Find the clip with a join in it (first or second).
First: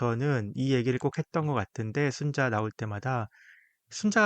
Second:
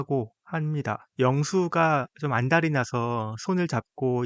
second